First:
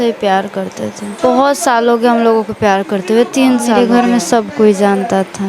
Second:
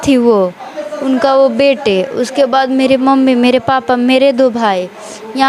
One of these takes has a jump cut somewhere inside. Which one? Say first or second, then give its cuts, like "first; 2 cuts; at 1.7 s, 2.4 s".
first; 2 cuts; at 1.2 s, 3.7 s